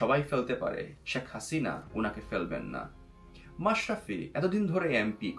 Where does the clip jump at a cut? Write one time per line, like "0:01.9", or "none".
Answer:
0:01.0